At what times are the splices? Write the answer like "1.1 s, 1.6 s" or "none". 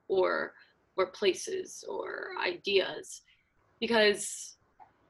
none